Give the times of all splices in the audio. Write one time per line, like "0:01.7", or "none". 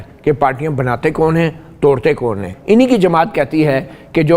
0:02.5